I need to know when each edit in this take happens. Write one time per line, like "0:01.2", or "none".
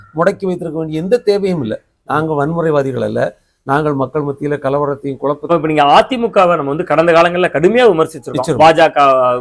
0:05.5